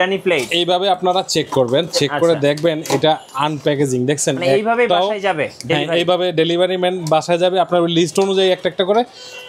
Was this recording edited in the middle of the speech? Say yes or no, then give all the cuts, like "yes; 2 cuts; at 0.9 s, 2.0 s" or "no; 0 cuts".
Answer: no; 0 cuts